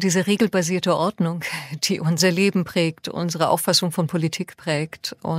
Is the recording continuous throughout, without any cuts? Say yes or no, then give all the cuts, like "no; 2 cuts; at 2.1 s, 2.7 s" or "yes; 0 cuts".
no; 2 cuts; at 2.2 s, 3.3 s